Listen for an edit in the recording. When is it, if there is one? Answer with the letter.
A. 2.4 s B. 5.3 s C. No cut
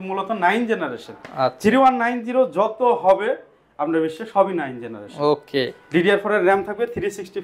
C